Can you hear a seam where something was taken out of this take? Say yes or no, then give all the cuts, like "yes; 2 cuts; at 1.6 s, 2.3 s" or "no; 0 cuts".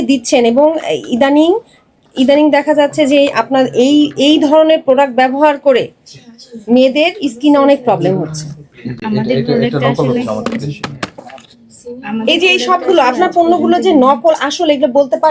no; 0 cuts